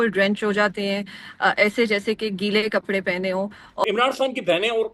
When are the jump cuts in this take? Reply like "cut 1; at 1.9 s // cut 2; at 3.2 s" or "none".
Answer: cut 1; at 3.8 s